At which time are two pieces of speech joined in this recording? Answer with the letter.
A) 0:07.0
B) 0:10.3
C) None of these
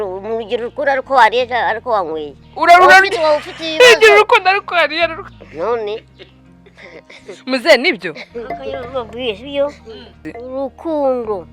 B